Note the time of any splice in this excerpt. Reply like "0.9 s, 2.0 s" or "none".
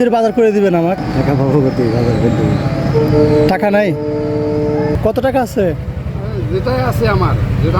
1.0 s, 4.9 s